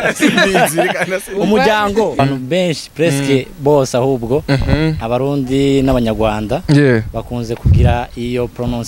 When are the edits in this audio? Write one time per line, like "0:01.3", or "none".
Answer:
0:02.2